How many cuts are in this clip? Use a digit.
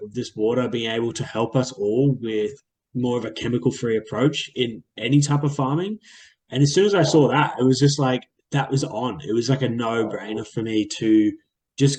0